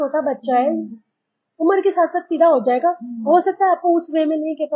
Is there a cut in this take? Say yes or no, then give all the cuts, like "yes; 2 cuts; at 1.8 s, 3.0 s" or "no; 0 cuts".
no; 0 cuts